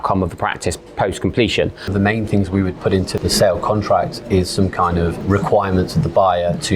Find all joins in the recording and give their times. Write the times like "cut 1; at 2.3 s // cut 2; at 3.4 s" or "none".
cut 1; at 1.9 s // cut 2; at 3.1 s // cut 3; at 5.2 s